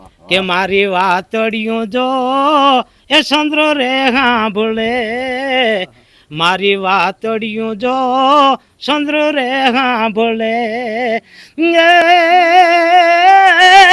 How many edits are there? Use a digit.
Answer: 0